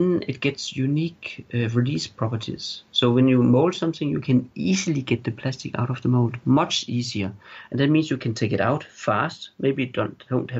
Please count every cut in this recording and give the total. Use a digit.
0